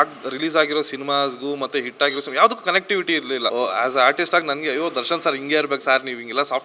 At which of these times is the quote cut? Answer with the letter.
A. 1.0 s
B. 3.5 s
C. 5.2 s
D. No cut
B